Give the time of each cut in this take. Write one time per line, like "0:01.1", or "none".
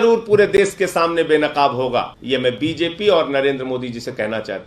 0:02.2